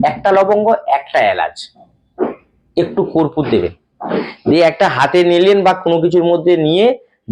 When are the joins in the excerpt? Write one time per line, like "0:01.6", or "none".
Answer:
none